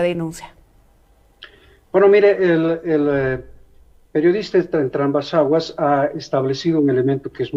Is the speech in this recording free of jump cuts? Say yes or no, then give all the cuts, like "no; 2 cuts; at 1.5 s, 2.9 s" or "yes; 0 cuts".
yes; 0 cuts